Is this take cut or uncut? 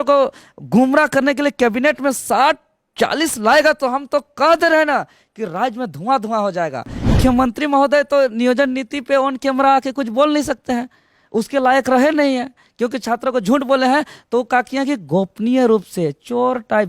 cut